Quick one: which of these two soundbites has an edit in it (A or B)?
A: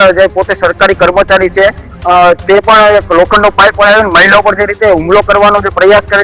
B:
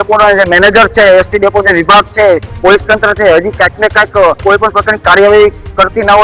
B